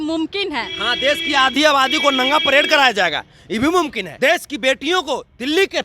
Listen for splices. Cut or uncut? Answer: cut